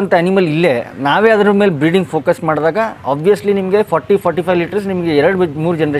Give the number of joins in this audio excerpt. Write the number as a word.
zero